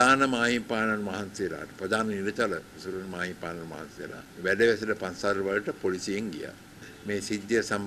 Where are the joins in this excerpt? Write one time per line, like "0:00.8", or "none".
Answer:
0:04.2
0:06.9